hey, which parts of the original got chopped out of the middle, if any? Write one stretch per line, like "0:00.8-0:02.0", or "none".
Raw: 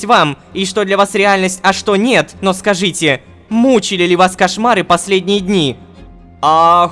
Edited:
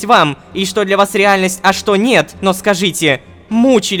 none

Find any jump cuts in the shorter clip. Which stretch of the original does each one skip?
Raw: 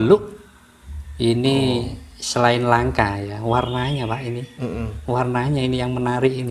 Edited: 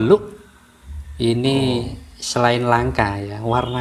none

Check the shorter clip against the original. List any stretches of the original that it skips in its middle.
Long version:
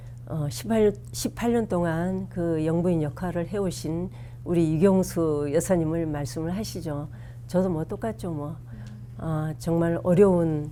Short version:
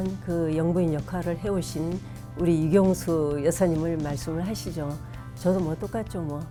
none

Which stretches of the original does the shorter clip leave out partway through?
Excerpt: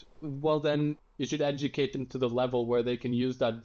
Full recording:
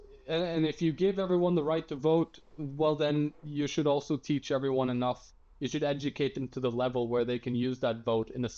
0:03.4-0:05.5

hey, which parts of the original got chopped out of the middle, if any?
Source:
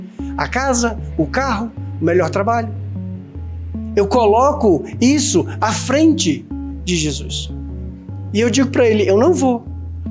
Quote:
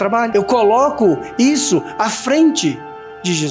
none

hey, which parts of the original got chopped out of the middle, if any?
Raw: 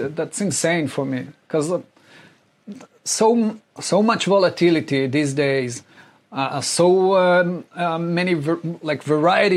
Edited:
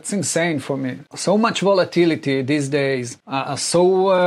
0:01.3-0:03.7
0:05.8-0:06.2

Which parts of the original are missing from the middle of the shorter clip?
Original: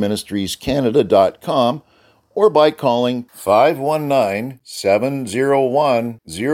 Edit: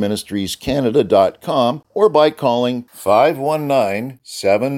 0:01.8-0:02.2

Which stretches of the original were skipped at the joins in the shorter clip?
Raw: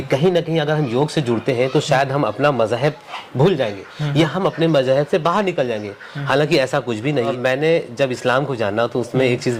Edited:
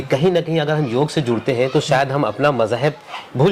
none

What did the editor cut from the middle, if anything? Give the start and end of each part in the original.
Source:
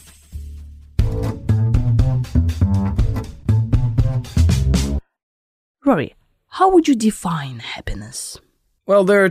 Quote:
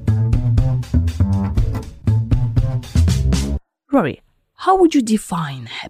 0:05.1-0:05.6

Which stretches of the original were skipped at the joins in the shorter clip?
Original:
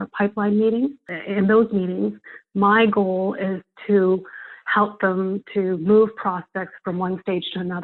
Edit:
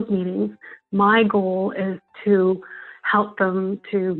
none

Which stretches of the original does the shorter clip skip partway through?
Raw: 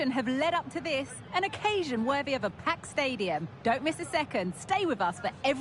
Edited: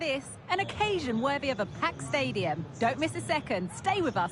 none

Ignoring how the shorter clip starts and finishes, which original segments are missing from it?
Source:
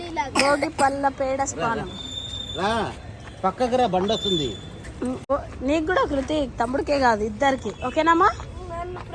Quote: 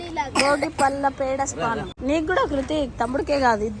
0:01.9-0:05.5

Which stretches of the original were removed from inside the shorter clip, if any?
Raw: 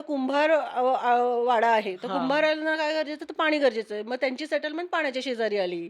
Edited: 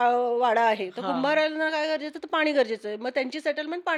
none

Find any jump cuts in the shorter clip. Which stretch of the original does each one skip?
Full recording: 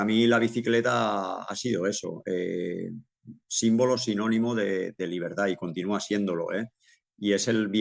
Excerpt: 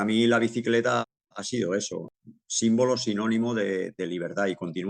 0:01.0-0:01.2
0:02.2-0:03.1

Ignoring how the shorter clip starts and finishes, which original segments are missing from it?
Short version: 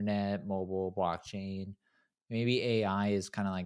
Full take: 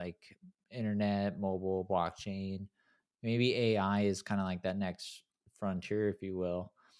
none

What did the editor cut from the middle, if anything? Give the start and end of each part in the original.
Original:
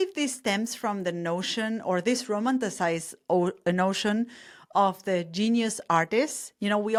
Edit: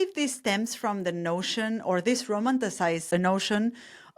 0:03.0-0:03.6

